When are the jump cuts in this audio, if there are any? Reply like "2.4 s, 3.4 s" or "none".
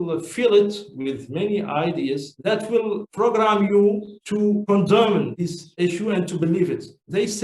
none

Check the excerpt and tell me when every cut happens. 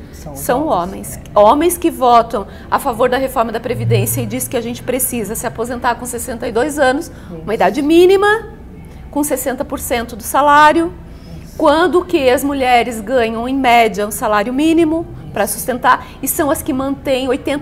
none

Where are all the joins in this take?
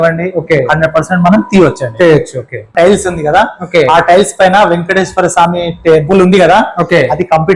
2.7 s

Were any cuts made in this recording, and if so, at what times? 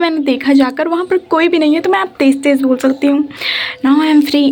none

